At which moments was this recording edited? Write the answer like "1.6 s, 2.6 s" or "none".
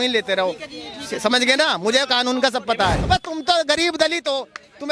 3.0 s